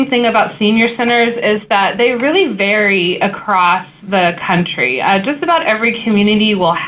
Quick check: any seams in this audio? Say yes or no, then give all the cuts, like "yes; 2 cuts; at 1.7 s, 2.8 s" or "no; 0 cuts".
no; 0 cuts